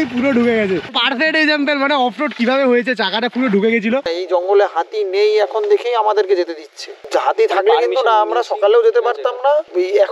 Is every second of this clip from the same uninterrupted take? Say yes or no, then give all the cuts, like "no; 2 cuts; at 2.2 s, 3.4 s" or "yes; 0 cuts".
no; 2 cuts; at 0.9 s, 4.1 s